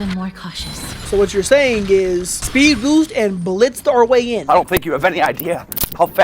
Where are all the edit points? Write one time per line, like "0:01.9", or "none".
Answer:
0:01.0
0:02.4